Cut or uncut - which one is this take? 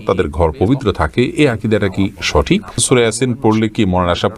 cut